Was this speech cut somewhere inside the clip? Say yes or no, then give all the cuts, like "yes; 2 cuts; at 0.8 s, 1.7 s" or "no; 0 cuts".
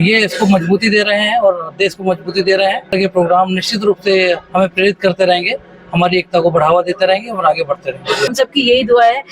yes; 2 cuts; at 2.9 s, 8.3 s